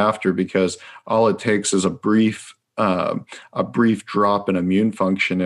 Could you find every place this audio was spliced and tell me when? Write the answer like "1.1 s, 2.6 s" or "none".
none